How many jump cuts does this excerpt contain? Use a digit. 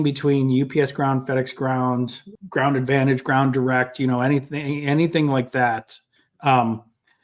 1